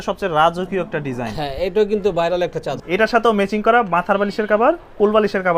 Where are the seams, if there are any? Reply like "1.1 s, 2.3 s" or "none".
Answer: 2.8 s